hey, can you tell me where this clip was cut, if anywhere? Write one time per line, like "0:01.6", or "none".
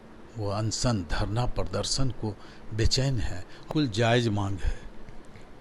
0:03.7